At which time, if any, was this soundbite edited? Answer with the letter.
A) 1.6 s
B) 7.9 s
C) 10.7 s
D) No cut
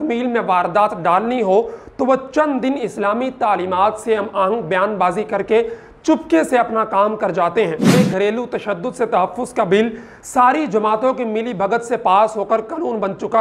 B